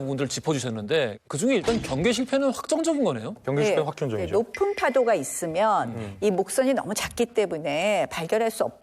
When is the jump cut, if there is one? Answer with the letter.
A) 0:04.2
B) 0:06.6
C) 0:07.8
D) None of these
A